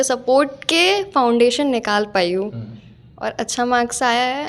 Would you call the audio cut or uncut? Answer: uncut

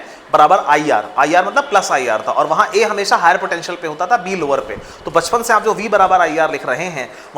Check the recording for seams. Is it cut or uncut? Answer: uncut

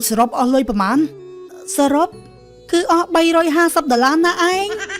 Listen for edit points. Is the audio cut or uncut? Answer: cut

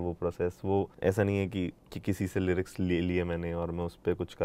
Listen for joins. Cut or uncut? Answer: cut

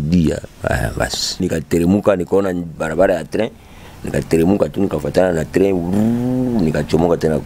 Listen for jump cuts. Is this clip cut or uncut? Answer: cut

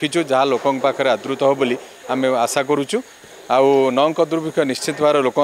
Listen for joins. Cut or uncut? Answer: uncut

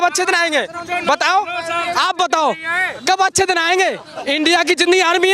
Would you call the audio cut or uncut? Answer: cut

